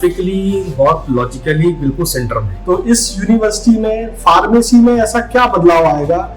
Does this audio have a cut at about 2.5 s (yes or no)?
yes